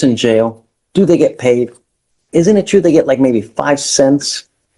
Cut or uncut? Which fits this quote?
uncut